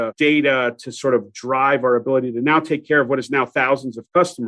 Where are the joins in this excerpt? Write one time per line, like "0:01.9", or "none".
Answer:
none